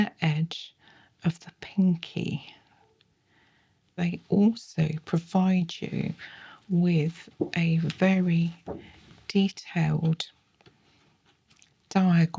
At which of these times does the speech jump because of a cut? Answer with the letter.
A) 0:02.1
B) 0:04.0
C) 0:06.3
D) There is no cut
B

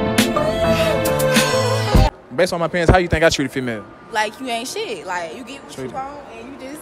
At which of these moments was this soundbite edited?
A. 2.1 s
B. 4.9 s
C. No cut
A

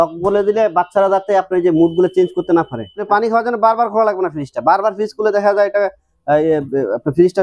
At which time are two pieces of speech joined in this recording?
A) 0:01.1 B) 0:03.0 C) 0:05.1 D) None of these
B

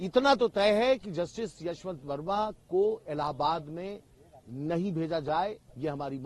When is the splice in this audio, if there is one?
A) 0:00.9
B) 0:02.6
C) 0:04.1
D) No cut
D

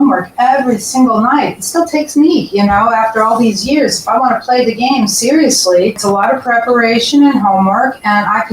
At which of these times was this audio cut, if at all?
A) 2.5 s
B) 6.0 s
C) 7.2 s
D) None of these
B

